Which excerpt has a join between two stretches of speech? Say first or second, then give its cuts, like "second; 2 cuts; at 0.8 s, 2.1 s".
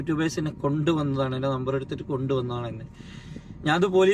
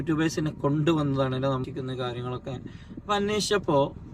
second; 1 cut; at 1.6 s